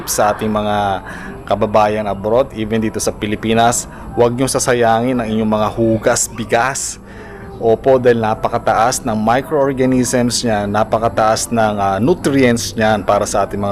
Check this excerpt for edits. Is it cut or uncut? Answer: uncut